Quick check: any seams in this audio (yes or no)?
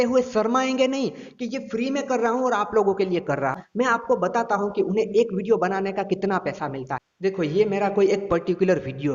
yes